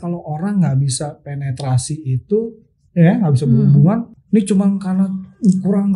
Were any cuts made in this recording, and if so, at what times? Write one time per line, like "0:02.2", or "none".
0:04.1

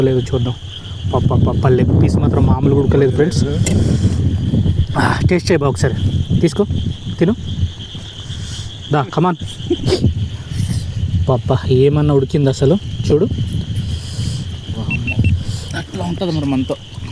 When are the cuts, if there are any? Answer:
none

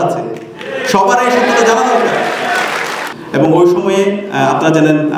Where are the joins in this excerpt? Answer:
0:03.1

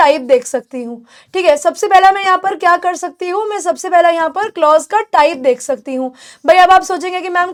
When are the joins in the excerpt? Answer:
none

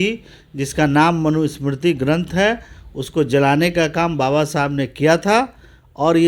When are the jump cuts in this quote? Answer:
none

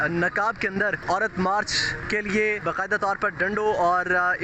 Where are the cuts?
0:01.0
0:01.9
0:02.6

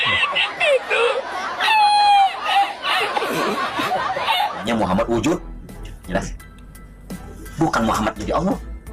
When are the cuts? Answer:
0:04.6
0:06.4

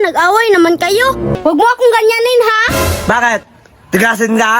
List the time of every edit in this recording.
0:01.4

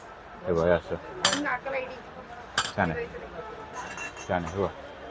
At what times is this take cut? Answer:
none

